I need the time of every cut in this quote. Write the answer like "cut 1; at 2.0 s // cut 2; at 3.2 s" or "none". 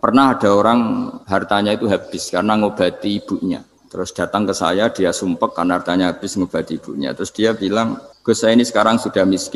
cut 1; at 1.2 s // cut 2; at 3.8 s // cut 3; at 8.1 s